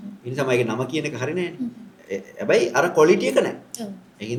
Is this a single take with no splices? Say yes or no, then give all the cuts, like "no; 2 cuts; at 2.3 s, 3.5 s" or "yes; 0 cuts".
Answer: yes; 0 cuts